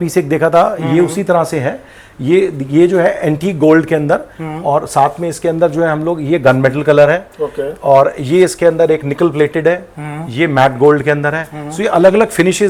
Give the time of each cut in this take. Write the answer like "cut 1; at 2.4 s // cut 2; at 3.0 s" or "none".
none